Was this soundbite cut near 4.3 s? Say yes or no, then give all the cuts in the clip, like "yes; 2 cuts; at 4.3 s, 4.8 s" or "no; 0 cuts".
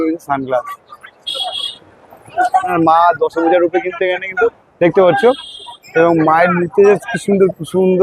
no; 1 cut; at 2.7 s